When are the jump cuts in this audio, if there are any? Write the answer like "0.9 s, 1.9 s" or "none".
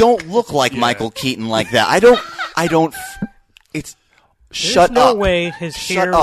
none